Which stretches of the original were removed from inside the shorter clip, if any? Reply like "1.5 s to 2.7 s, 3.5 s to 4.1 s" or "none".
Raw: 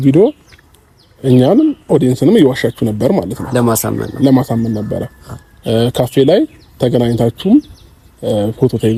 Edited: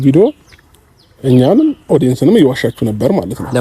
none